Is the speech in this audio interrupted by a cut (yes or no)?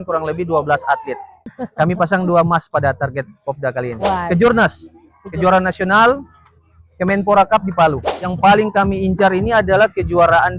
yes